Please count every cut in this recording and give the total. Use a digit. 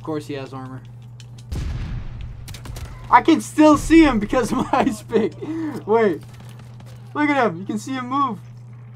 1